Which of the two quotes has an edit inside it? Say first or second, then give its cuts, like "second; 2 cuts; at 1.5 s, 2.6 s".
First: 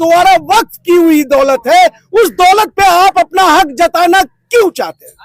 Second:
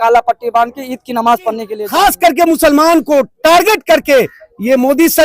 second; 1 cut; at 1.7 s